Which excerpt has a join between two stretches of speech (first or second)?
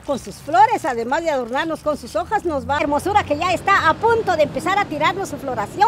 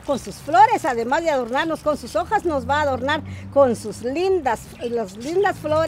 first